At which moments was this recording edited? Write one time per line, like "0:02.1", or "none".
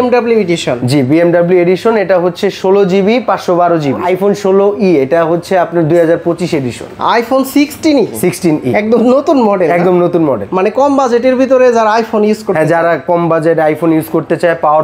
0:04.0